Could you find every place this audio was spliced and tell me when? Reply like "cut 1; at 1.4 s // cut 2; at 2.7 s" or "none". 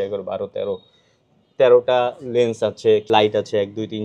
cut 1; at 3.0 s